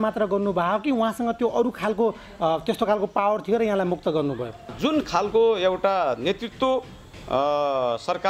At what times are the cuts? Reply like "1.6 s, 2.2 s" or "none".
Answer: 4.7 s